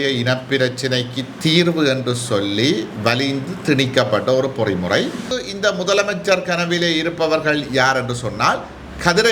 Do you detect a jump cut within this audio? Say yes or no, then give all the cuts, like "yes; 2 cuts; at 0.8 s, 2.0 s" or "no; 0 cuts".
yes; 1 cut; at 5.4 s